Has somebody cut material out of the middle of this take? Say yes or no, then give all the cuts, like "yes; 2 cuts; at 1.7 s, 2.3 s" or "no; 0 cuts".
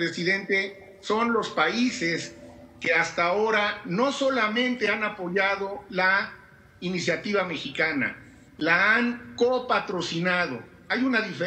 no; 0 cuts